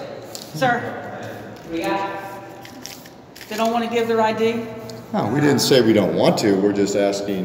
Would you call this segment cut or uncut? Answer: uncut